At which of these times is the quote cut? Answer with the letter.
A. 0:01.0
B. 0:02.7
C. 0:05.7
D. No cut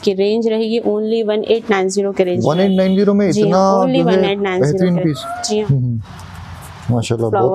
C